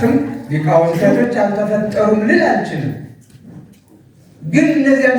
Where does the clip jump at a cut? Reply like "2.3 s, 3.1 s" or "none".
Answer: 1.0 s